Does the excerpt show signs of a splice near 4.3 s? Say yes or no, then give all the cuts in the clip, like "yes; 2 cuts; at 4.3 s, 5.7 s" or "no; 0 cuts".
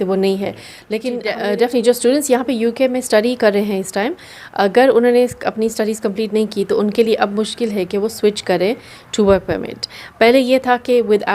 no; 1 cut; at 1.2 s